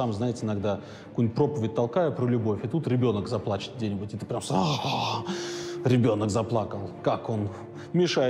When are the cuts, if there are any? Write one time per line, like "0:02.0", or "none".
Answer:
none